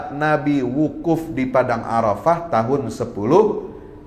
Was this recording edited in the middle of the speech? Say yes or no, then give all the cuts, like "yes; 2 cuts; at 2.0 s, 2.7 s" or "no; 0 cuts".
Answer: no; 0 cuts